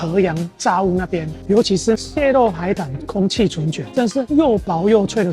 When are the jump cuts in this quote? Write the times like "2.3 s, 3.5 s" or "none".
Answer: 1.3 s